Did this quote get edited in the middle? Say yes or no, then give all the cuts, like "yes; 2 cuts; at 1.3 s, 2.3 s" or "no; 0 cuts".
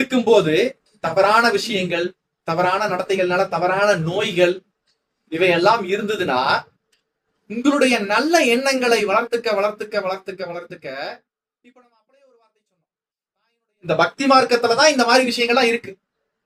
yes; 1 cut; at 13.8 s